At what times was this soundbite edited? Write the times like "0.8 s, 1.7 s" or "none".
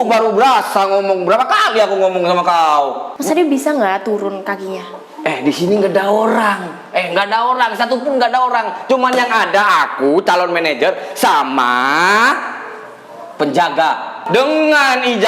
3.1 s, 14.2 s